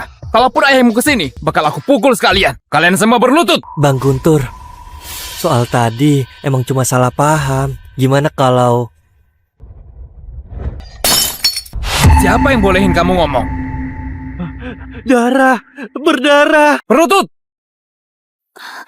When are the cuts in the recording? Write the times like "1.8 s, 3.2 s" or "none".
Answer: 1.3 s, 2.6 s, 3.7 s, 9.6 s, 16.8 s